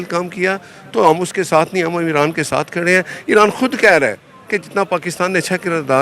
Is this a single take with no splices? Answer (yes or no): yes